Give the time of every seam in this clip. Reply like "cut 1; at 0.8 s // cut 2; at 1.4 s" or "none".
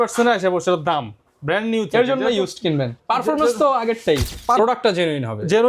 cut 1; at 4.6 s

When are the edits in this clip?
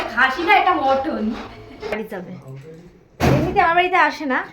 cut 1; at 2.0 s

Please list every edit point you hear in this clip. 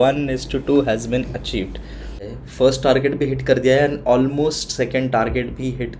cut 1; at 2.3 s

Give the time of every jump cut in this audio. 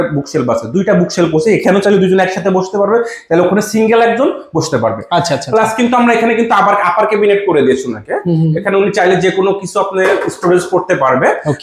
none

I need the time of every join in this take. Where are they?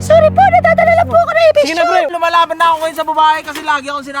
cut 1; at 2.1 s

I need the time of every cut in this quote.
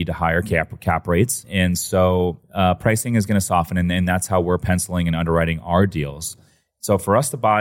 cut 1; at 1.5 s // cut 2; at 2.4 s

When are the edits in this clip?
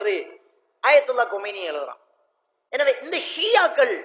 none

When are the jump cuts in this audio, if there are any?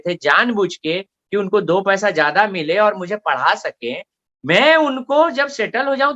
none

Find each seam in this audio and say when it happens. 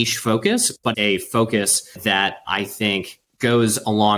cut 1; at 0.9 s

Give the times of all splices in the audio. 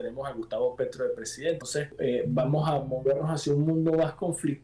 cut 1; at 1.8 s

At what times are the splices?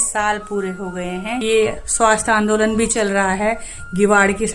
cut 1; at 1.4 s

